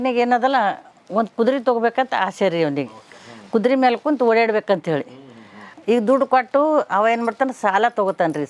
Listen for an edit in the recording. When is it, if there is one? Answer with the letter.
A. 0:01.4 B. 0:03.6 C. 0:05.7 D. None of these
C